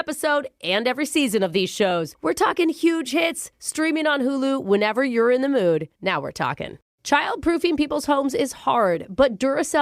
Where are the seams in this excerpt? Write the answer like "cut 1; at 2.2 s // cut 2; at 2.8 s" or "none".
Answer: cut 1; at 6.7 s

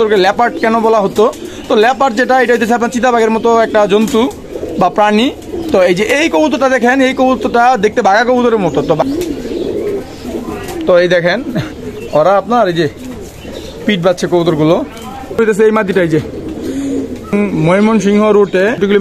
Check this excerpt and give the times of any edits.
cut 1; at 9.0 s // cut 2; at 15.4 s // cut 3; at 17.3 s

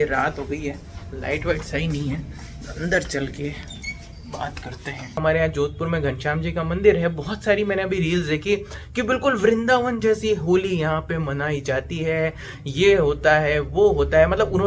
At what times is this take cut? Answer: cut 1; at 5.2 s

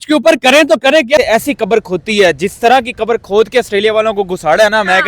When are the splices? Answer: cut 1; at 1.2 s

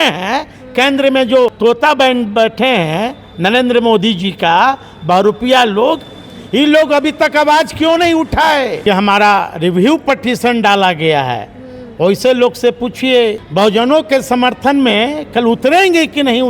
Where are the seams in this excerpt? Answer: cut 1; at 1.6 s // cut 2; at 8.8 s // cut 3; at 13.4 s

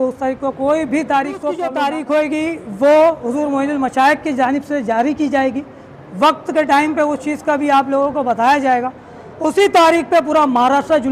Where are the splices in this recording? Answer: cut 1; at 1.7 s

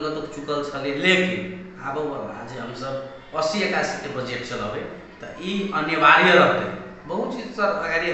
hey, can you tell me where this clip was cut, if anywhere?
none

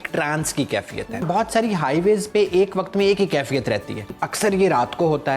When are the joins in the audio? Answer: cut 1; at 1.2 s // cut 2; at 4.2 s

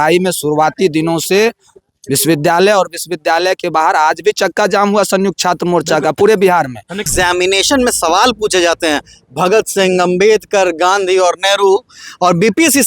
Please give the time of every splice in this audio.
cut 1; at 7.1 s

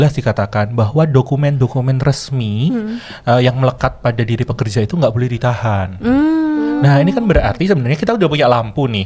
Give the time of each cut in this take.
none

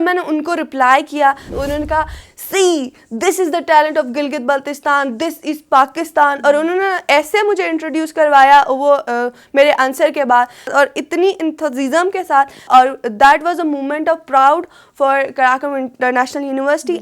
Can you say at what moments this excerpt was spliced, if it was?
cut 1; at 1.5 s // cut 2; at 10.7 s // cut 3; at 12.6 s

